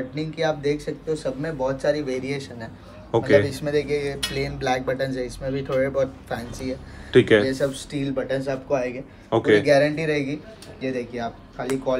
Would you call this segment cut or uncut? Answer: uncut